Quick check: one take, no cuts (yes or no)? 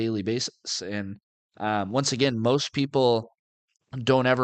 yes